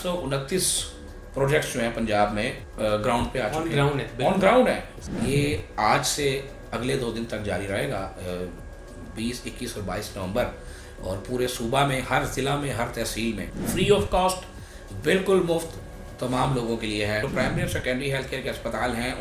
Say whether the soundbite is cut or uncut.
cut